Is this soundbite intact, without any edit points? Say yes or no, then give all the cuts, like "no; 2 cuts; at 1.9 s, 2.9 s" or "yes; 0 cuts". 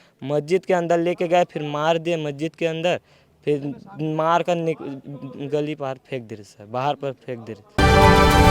no; 1 cut; at 7.6 s